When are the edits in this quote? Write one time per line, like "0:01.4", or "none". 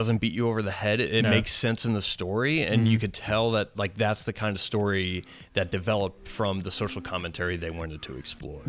none

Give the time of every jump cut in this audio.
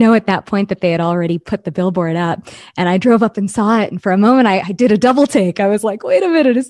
none

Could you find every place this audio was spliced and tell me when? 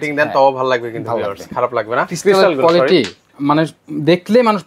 0:02.1

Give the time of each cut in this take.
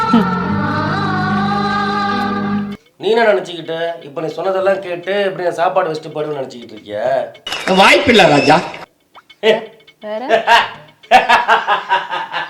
0:02.7

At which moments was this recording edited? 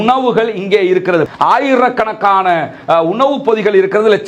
0:01.3

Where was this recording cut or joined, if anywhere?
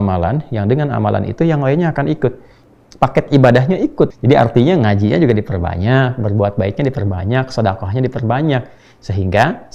0:02.6
0:04.1

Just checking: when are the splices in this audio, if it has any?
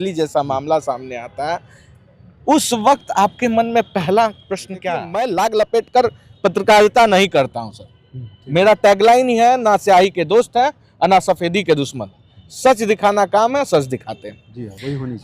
0:05.1

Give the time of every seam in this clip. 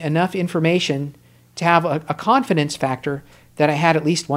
none

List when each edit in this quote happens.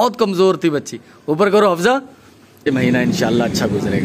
0:02.7

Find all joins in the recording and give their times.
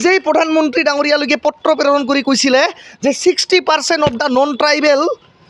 none

